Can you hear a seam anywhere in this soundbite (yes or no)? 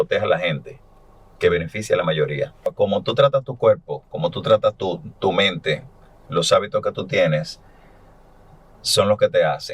yes